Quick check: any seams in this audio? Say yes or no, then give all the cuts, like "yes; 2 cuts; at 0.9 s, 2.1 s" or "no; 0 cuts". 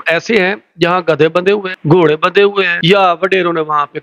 yes; 2 cuts; at 1.7 s, 2.7 s